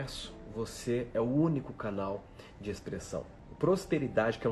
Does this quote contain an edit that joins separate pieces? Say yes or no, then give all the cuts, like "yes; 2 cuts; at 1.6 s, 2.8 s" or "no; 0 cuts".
yes; 1 cut; at 3.4 s